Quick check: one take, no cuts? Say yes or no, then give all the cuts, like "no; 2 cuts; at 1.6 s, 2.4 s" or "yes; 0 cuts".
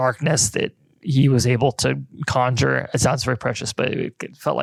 yes; 0 cuts